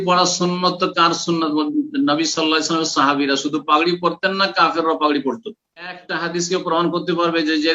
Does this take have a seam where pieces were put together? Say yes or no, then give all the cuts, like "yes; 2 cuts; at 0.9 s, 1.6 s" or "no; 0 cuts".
yes; 1 cut; at 6.1 s